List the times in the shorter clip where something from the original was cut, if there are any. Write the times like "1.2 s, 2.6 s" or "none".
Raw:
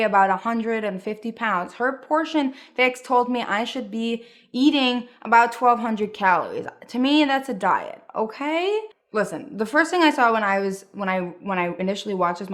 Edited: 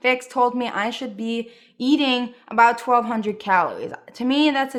none